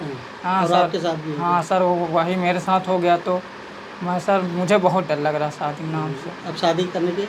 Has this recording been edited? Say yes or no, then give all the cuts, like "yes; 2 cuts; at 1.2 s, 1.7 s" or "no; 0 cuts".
no; 0 cuts